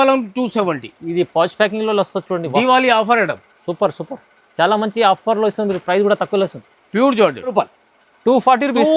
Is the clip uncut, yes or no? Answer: no